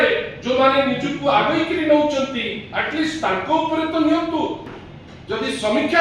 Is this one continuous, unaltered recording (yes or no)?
no